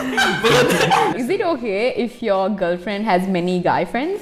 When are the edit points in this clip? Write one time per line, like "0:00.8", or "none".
0:01.1